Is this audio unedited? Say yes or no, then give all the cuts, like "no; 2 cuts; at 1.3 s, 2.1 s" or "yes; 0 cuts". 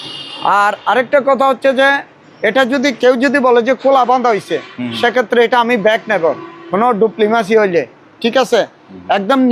yes; 0 cuts